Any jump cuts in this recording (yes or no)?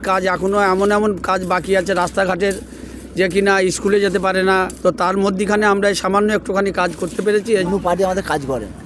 yes